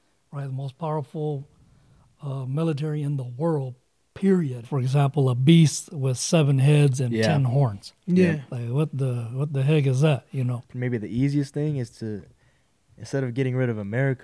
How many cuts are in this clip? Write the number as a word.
two